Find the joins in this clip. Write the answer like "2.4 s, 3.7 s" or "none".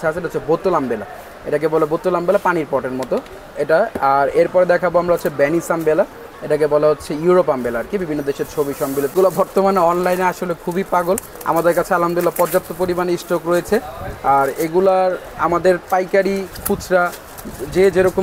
9.1 s